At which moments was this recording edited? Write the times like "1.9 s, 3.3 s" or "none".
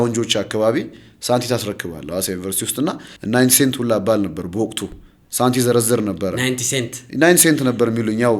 3.1 s